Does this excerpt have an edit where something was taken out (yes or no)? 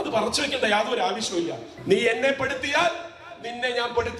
yes